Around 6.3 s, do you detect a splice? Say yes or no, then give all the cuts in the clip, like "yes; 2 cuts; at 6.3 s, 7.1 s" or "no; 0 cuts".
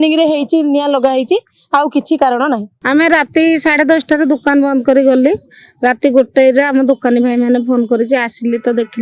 no; 1 cut; at 2.7 s